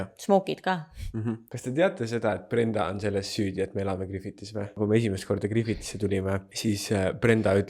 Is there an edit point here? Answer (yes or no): yes